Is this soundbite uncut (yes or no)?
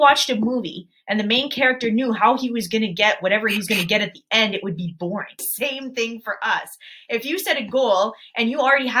no